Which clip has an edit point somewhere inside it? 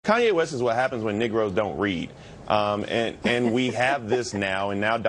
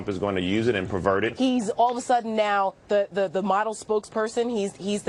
second; 1 cut; at 1.3 s

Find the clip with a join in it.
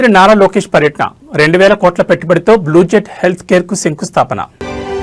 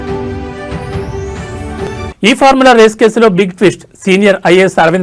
second; 1 cut; at 1.7 s

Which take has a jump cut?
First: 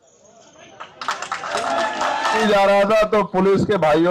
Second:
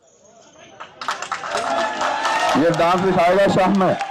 first; 1 cut; at 2.4 s

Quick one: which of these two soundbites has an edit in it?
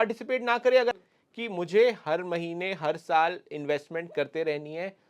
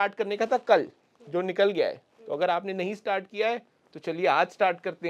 first; 1 cut; at 0.9 s

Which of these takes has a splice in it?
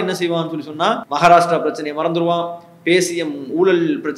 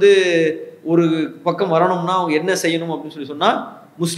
first; 1 cut; at 1.1 s

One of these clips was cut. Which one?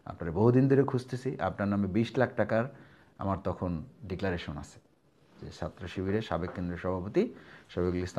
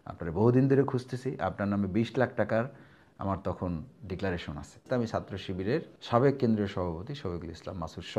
second; 2 cuts; at 4.8 s, 5.9 s

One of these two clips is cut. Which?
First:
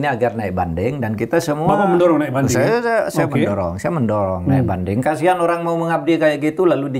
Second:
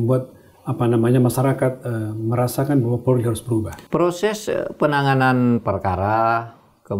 second; 1 cut; at 3.8 s

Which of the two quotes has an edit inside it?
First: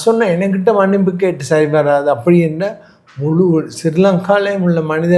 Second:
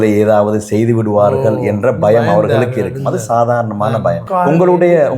second; 1 cut; at 4.2 s

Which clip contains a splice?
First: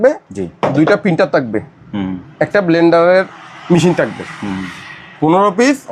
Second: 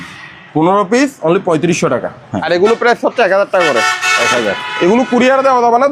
second; 1 cut; at 2.3 s

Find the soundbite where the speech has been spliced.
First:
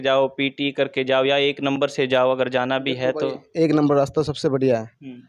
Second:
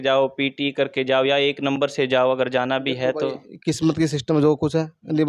second; 1 cut; at 3.4 s

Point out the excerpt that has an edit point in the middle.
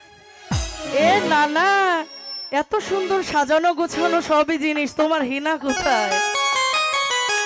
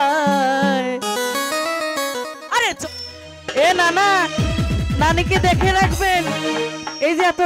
second; 1 cut; at 2.8 s

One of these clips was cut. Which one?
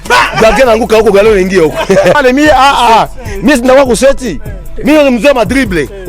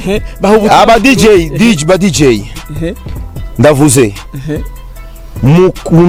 first; 1 cut; at 2.2 s

